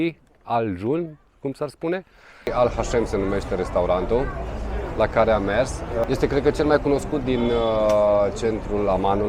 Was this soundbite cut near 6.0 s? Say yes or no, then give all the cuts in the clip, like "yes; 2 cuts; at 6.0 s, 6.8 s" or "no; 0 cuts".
yes; 2 cuts; at 2.5 s, 6.0 s